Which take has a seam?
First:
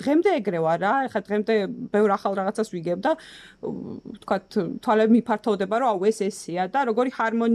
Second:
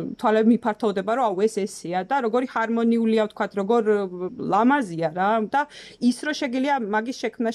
second; 2 cuts; at 4.3 s, 5.5 s

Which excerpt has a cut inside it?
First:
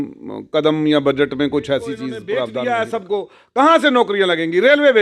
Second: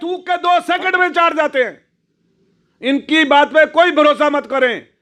first; 1 cut; at 2.5 s

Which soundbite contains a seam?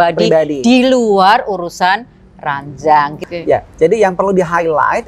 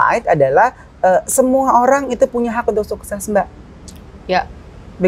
first; 1 cut; at 3.2 s

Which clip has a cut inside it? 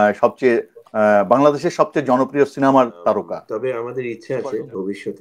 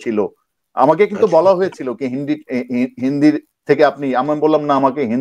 first; 1 cut; at 3.4 s

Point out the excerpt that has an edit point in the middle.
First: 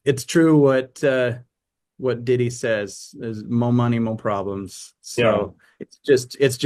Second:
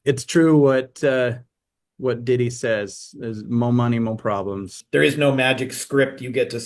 second; 1 cut; at 4.8 s

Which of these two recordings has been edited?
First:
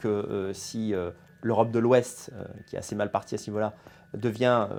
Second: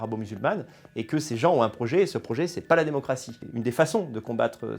second; 1 cut; at 3.4 s

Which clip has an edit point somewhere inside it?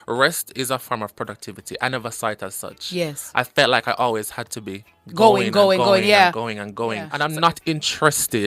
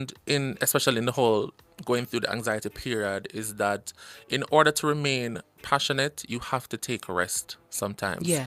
first; 1 cut; at 7.2 s

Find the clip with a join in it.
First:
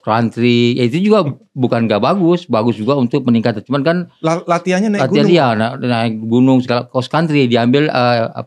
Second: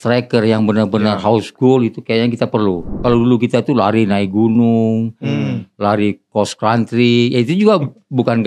second; 1 cut; at 2.9 s

